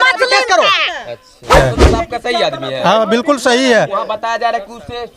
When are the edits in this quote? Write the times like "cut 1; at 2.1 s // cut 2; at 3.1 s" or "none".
cut 1; at 1.6 s